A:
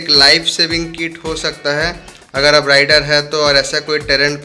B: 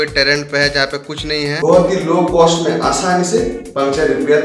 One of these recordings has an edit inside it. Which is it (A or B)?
B